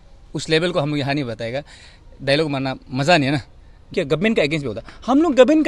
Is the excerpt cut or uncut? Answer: cut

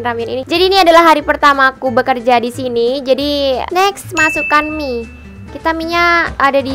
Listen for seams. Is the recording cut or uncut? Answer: cut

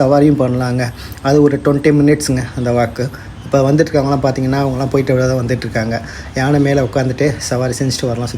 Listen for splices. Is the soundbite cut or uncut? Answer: uncut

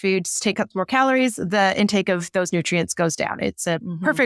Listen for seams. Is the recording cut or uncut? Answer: uncut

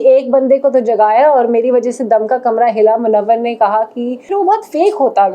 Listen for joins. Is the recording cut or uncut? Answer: cut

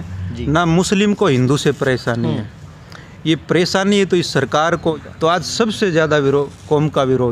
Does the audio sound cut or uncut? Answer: cut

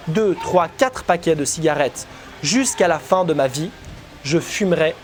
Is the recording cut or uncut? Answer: uncut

